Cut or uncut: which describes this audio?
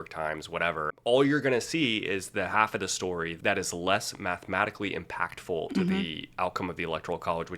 cut